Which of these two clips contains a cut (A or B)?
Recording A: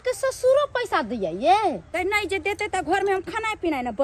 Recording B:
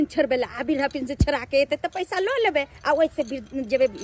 A